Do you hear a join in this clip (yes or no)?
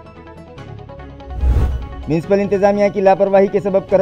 yes